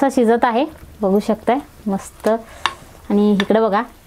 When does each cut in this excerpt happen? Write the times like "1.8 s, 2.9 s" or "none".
none

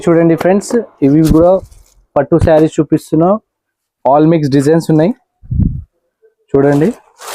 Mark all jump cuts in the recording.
none

